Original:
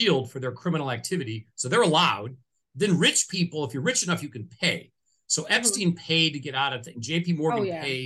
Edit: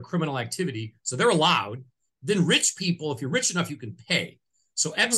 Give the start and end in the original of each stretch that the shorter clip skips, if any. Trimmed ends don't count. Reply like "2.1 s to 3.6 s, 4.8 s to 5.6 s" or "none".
none